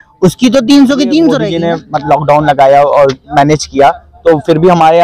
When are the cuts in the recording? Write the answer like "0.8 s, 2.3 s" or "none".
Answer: 1.5 s